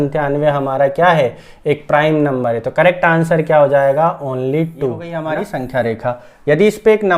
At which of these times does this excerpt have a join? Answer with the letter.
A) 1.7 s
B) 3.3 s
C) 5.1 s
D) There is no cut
C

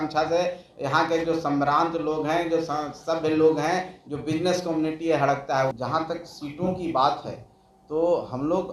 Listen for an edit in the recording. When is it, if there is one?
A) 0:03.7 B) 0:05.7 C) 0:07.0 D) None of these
B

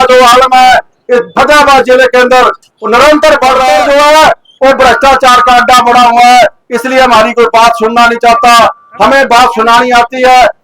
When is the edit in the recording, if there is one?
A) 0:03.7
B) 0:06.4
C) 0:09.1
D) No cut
A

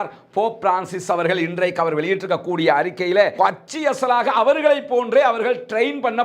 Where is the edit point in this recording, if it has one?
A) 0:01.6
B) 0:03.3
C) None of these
B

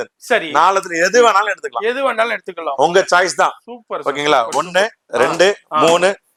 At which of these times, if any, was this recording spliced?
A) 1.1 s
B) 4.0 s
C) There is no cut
C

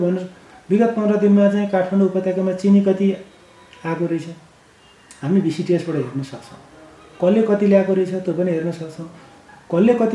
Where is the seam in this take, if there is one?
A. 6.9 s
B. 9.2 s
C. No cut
C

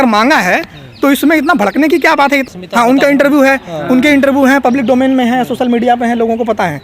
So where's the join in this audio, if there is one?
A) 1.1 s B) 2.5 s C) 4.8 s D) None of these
B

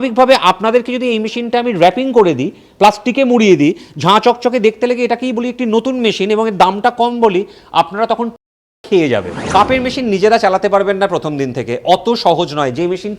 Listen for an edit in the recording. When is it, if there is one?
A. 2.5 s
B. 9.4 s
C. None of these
B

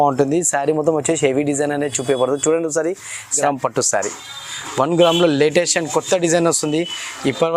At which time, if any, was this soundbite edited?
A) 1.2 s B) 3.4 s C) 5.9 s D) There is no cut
B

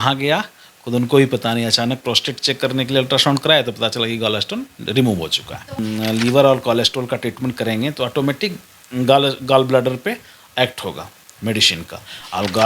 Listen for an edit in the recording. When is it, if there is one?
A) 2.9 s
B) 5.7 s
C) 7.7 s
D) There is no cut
B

